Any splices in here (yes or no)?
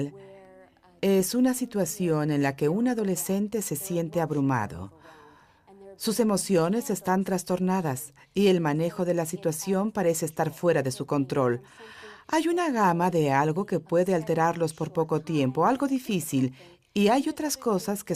yes